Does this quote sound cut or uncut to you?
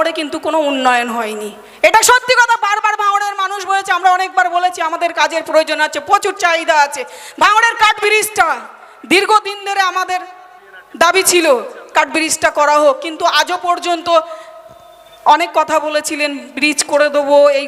uncut